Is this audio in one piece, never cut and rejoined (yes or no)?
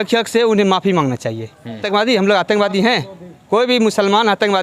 no